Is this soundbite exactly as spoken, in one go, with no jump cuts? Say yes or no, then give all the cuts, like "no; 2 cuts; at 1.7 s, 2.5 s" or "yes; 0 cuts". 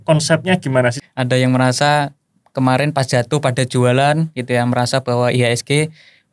no; 1 cut; at 1.0 s